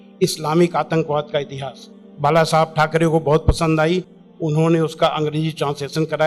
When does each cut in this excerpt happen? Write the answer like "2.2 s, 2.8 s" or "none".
none